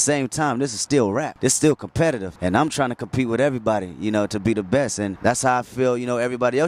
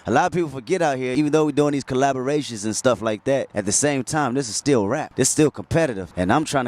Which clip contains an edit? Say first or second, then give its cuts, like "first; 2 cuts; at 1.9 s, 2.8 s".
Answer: second; 1 cut; at 1.1 s